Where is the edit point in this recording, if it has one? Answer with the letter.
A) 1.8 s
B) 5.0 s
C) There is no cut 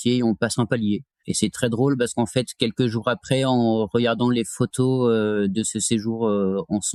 C